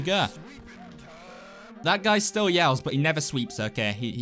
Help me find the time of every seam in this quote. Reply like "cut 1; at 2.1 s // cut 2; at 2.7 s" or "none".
cut 1; at 1.8 s